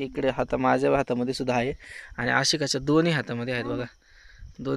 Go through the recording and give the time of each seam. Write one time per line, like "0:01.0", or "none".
none